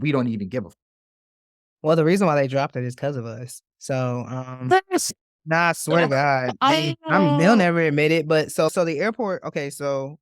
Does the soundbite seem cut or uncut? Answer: cut